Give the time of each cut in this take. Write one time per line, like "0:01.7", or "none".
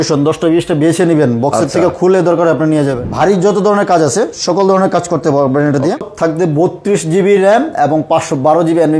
0:03.1
0:06.0